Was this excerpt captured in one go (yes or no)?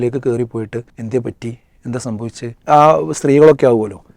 no